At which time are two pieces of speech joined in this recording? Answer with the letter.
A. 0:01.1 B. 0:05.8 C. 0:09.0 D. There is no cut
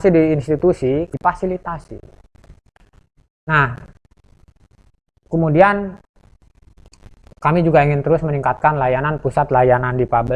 D